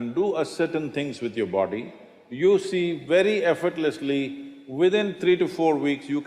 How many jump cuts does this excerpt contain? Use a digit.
0